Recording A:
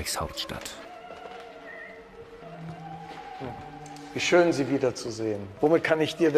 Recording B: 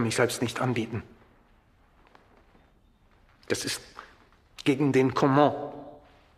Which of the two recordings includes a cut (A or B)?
A